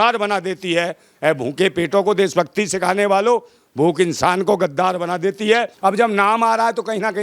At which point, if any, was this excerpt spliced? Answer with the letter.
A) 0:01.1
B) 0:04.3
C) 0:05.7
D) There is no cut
C